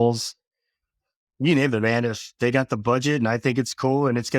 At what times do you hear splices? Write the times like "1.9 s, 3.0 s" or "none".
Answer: none